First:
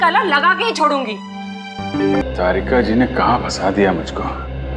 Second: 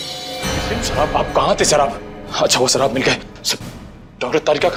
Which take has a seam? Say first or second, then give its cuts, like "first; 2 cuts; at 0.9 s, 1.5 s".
first; 1 cut; at 2.2 s